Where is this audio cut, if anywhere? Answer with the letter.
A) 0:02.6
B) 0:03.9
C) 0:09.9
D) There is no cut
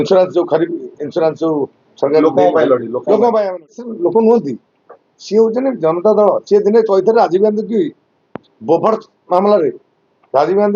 B